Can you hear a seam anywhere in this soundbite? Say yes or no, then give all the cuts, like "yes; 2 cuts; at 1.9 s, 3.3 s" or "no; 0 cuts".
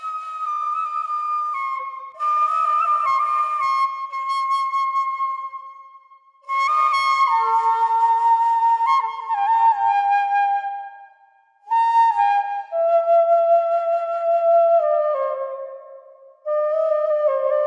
no; 0 cuts